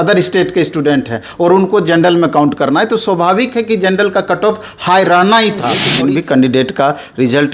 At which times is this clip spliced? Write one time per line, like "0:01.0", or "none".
0:05.9